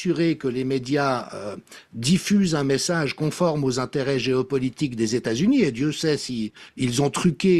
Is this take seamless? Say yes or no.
yes